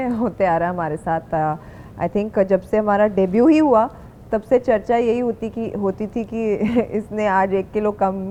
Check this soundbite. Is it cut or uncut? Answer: uncut